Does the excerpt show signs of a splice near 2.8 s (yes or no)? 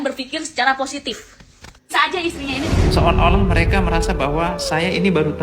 yes